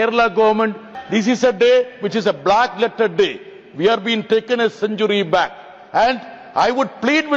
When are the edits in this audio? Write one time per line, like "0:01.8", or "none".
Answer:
0:00.9